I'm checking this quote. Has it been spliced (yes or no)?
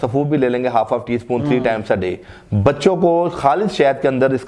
no